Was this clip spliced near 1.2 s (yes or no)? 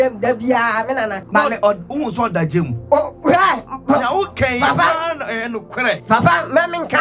yes